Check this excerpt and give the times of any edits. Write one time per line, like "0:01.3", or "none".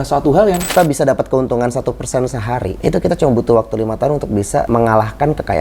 0:00.7
0:02.7
0:04.7